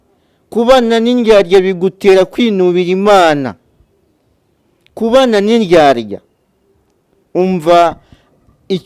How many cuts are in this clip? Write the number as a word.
zero